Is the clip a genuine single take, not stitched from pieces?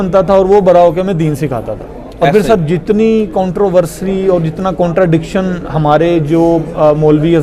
yes; 0 cuts

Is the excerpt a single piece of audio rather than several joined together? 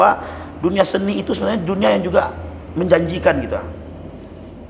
yes; 0 cuts

